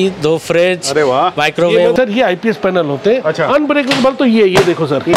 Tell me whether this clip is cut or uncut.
cut